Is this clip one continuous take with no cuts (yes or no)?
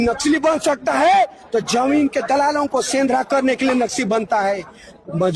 yes